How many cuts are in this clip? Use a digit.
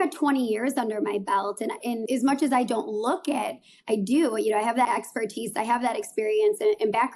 2